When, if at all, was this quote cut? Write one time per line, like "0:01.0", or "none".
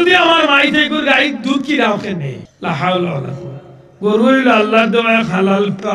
0:02.4